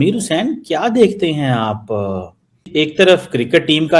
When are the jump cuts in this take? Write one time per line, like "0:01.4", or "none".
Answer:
0:02.7